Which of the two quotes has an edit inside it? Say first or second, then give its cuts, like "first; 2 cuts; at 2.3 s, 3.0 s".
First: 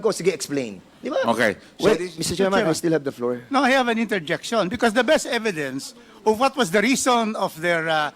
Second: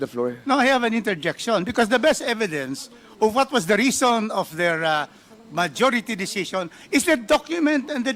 first; 1 cut; at 1.7 s